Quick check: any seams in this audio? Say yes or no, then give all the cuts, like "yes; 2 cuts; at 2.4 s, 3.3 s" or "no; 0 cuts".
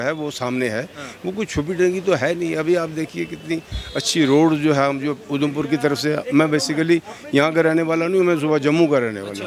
no; 0 cuts